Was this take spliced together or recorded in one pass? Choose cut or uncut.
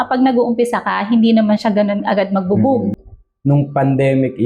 cut